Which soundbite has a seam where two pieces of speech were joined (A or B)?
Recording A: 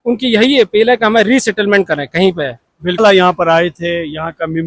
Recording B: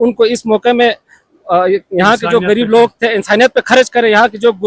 A